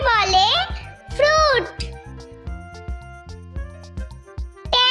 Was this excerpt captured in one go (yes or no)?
yes